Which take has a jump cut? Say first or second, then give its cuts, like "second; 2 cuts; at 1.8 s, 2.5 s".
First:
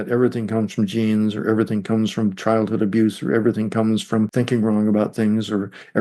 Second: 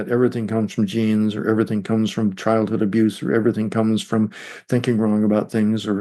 first; 1 cut; at 4.3 s